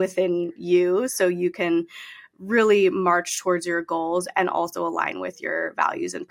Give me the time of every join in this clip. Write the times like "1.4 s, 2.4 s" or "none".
none